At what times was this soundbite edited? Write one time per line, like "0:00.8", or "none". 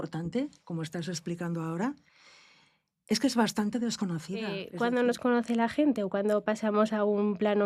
0:04.6